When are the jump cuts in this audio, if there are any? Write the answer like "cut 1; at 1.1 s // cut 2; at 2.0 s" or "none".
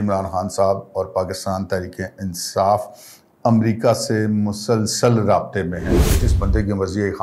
cut 1; at 6.2 s